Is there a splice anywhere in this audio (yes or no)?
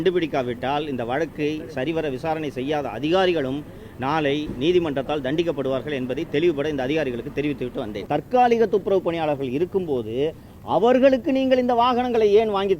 yes